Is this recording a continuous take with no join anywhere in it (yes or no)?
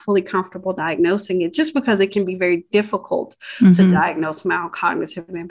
yes